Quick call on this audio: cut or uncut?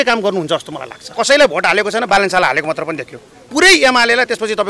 cut